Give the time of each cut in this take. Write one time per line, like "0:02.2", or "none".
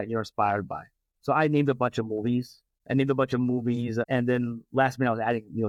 none